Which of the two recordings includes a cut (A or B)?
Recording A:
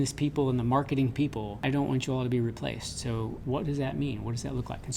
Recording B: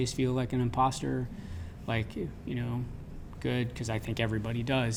A